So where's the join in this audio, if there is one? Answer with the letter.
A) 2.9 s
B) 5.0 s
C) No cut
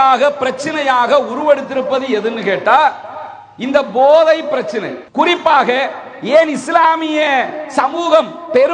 B